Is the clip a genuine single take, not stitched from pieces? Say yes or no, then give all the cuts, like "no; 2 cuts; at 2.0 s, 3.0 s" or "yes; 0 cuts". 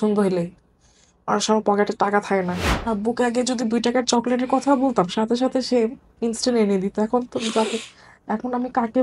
no; 1 cut; at 2.7 s